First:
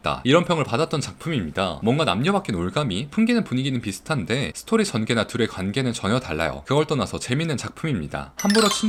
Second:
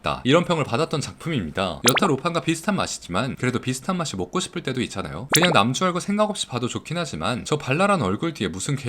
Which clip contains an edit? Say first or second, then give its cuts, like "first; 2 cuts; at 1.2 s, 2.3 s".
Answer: second; 2 cuts; at 1.8 s, 5.2 s